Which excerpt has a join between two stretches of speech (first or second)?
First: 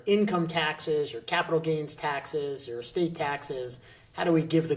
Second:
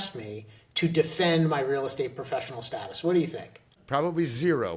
second